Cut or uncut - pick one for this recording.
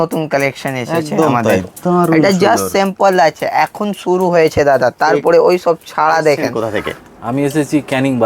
cut